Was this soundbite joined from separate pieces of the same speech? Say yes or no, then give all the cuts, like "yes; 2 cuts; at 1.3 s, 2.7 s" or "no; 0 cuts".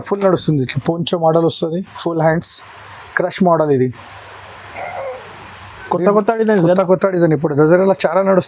no; 0 cuts